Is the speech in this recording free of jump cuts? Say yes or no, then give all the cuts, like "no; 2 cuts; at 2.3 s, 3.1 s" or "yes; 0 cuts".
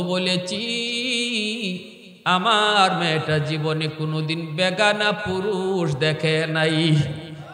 yes; 0 cuts